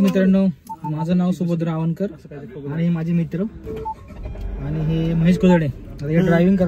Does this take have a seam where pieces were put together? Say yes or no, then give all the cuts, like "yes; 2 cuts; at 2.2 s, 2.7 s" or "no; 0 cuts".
no; 0 cuts